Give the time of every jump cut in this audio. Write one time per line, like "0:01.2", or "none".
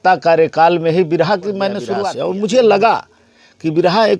0:02.0